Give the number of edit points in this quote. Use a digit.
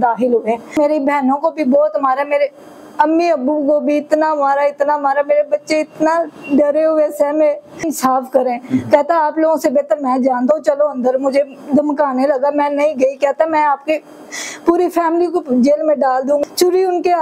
3